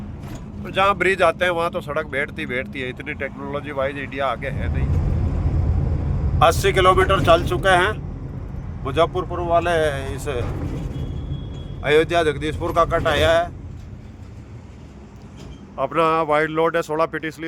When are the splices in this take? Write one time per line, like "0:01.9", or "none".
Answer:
0:04.6
0:13.8

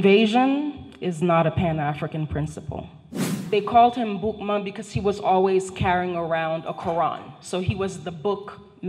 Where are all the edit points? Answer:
0:03.4

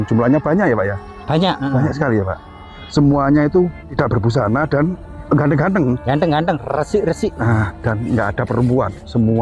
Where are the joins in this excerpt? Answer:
0:03.9
0:05.1

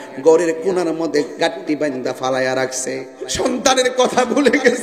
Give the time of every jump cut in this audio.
0:03.3

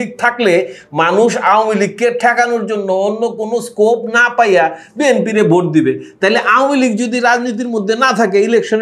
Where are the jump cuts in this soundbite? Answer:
none

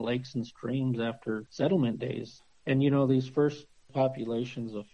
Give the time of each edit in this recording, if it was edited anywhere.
0:01.5
0:02.3
0:03.9

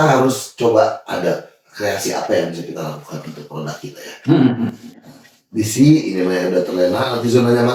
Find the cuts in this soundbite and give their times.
none

